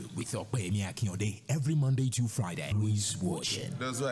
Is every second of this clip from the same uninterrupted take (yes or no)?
no